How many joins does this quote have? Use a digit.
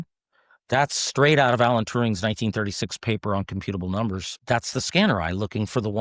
1